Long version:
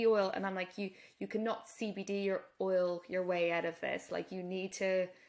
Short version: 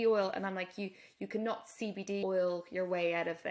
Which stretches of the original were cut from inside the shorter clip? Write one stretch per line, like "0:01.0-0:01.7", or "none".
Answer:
0:02.2-0:02.6